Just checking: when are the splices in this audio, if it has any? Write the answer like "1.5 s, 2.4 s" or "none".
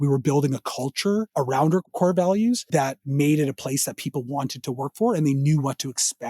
1.3 s, 2.6 s